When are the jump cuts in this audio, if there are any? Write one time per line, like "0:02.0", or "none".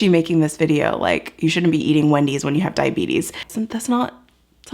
0:03.5